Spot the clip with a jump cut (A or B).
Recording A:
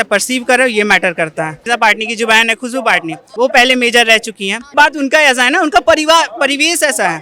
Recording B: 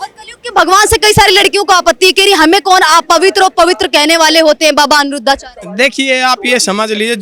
A